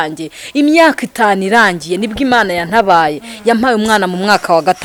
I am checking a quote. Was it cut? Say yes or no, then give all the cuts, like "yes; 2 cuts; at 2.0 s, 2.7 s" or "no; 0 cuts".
no; 0 cuts